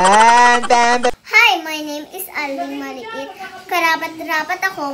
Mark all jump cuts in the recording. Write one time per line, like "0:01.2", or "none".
0:01.1